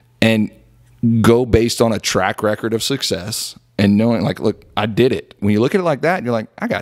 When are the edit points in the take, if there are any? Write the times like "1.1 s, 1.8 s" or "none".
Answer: 5.4 s